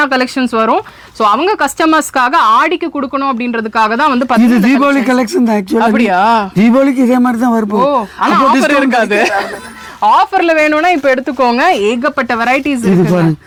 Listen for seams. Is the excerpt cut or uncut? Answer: uncut